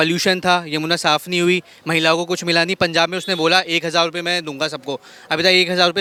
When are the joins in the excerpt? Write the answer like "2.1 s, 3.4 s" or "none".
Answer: none